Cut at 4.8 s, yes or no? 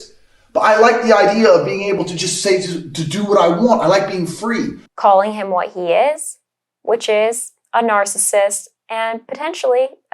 yes